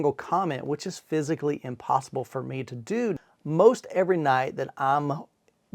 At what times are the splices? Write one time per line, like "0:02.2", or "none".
0:03.2